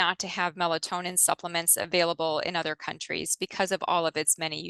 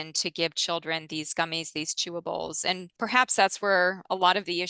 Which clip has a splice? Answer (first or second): second